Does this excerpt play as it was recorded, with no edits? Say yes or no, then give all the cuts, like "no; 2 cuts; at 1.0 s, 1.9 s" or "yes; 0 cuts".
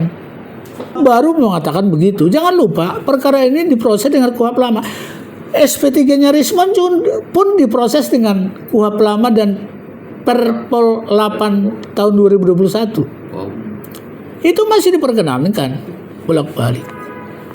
no; 1 cut; at 1.0 s